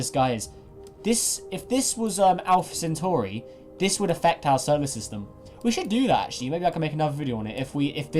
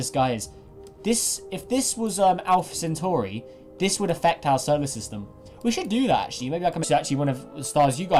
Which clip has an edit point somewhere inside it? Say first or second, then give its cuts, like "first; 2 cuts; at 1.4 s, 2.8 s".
first; 1 cut; at 6.8 s